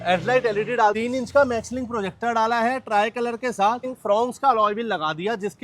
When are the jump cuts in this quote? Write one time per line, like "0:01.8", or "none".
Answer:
0:01.0
0:04.0